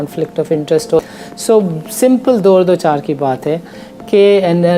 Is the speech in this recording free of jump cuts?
no; 1 cut; at 1.0 s

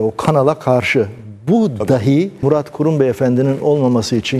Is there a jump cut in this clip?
yes; 1 cut; at 2.3 s

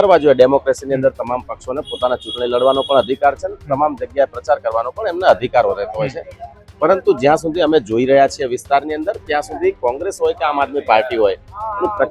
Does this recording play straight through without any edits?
yes; 0 cuts

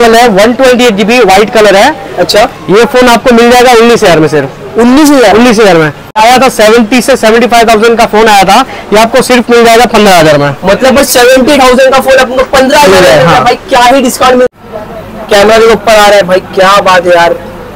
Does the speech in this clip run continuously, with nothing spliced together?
no; 2 cuts; at 6.1 s, 14.5 s

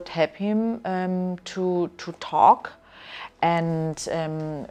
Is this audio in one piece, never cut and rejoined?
yes; 0 cuts

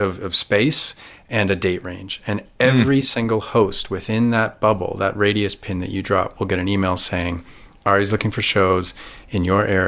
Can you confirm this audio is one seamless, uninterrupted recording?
yes; 0 cuts

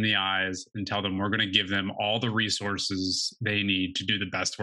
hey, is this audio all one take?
yes; 0 cuts

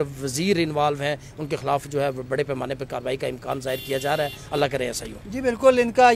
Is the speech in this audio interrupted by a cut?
no; 0 cuts

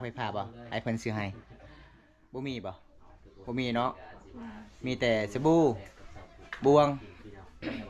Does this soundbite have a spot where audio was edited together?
no; 0 cuts

